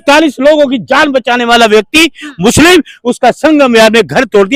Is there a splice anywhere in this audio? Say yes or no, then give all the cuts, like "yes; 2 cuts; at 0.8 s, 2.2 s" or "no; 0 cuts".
no; 0 cuts